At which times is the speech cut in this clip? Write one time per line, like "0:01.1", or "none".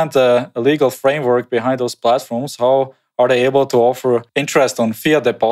none